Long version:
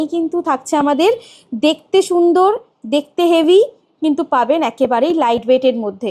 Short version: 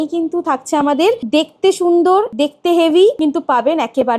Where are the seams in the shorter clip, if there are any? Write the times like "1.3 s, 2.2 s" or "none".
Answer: 1.2 s, 2.3 s, 3.2 s

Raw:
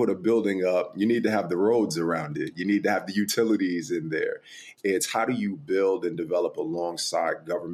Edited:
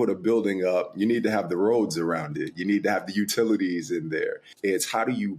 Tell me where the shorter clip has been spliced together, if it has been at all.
4.5 s

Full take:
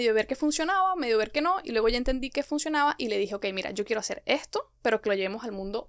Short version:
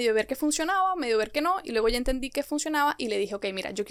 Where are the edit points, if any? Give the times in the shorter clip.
none

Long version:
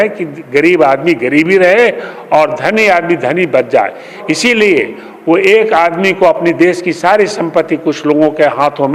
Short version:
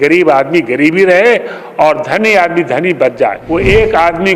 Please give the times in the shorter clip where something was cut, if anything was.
3.4 s

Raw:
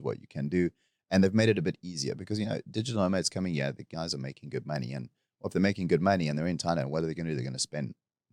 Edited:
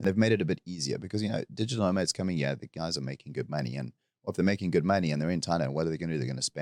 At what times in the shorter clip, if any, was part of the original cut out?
none

